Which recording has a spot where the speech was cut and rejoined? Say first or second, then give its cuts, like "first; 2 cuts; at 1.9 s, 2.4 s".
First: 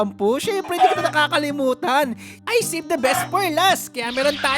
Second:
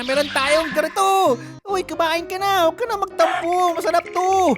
second; 1 cut; at 1.6 s